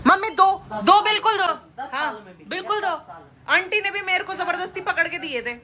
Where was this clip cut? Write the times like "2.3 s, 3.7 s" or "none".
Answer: 1.5 s